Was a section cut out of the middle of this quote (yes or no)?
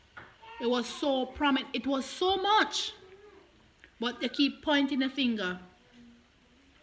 no